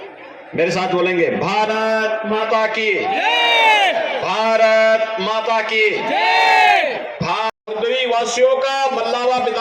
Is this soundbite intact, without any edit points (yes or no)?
no